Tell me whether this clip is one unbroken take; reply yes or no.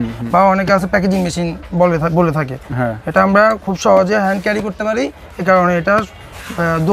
yes